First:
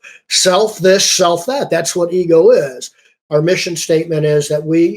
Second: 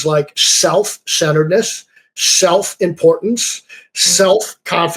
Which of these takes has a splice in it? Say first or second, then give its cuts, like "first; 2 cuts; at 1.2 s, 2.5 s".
first; 1 cut; at 3.2 s